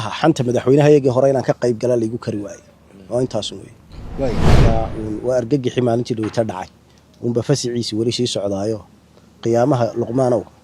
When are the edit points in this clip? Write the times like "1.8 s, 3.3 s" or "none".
4.6 s